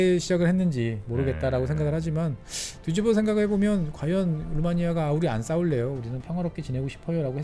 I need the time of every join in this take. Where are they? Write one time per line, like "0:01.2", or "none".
none